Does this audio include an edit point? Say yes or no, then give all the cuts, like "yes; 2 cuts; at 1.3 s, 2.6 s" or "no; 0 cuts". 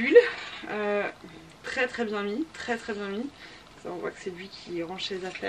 no; 0 cuts